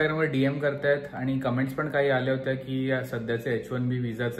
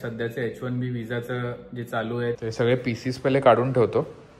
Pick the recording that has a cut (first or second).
second